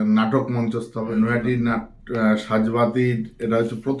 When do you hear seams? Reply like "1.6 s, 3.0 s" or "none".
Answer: 1.0 s